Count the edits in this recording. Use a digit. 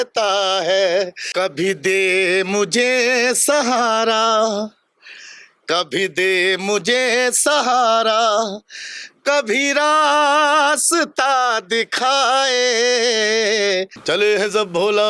2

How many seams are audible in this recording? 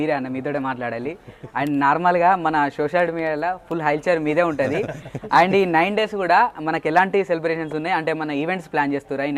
0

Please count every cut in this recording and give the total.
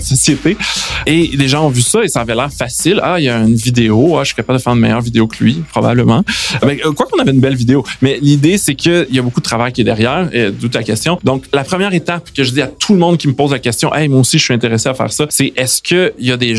4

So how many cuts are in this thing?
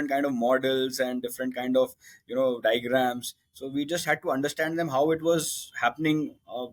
0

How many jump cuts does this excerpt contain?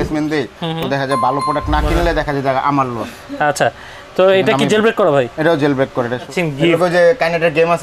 1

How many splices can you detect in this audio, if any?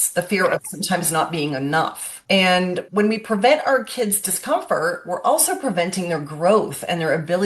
2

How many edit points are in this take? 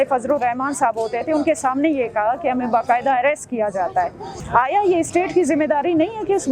1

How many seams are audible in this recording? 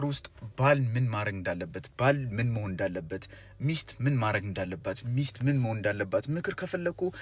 0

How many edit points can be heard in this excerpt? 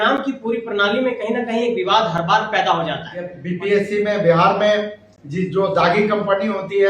1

